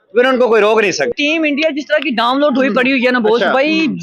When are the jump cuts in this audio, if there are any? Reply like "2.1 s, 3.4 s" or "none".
none